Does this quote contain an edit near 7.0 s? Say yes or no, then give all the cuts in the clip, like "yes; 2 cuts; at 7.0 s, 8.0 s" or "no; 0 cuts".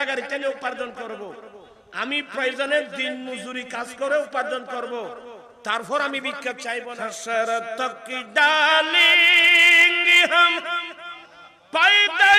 yes; 1 cut; at 7.0 s